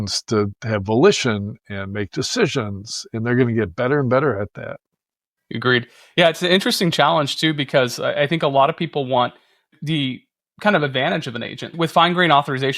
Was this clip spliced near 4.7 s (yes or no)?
no